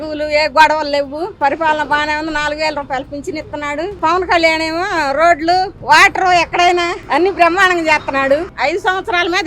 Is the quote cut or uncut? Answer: cut